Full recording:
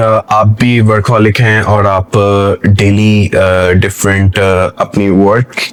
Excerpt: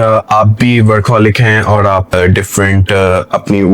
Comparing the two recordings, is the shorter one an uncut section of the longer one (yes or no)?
no